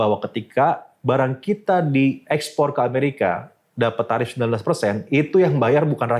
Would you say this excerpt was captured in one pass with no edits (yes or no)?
yes